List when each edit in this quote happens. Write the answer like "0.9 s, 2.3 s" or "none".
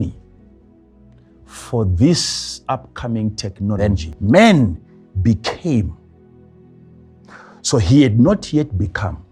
3.8 s